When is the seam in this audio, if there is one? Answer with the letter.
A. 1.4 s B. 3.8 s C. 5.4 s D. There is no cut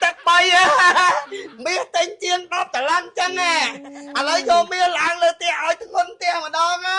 A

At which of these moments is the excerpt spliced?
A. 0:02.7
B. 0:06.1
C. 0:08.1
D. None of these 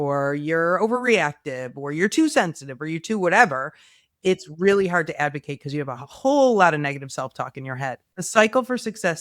C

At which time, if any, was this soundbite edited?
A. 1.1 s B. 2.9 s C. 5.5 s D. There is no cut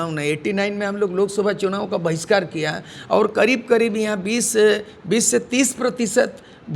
D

